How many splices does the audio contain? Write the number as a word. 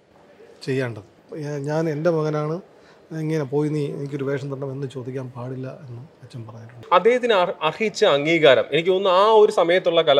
two